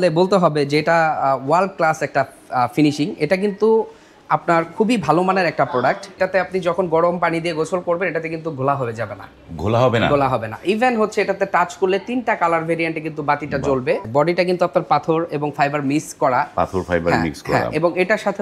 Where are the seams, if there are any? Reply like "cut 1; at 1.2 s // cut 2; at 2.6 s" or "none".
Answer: cut 1; at 6.1 s // cut 2; at 14.1 s